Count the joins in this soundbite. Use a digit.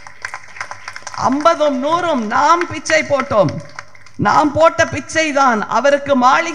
0